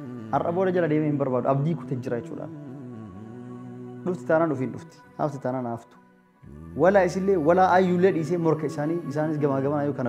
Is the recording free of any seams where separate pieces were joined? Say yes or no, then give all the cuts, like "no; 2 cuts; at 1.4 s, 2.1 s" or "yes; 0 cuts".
yes; 0 cuts